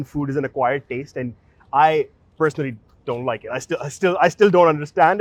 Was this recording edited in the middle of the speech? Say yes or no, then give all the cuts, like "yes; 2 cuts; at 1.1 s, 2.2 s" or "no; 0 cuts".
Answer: no; 0 cuts